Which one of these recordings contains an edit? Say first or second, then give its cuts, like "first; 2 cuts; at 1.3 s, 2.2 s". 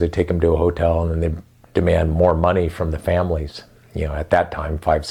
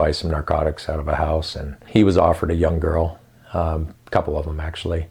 second; 1 cut; at 1.8 s